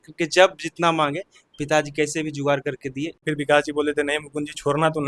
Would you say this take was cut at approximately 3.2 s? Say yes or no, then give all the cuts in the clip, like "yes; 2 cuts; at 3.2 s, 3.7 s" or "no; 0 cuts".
yes; 1 cut; at 3.2 s